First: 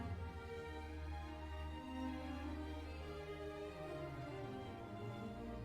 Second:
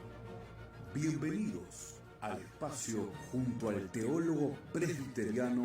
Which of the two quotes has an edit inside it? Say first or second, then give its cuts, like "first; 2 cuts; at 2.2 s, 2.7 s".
second; 1 cut; at 4.2 s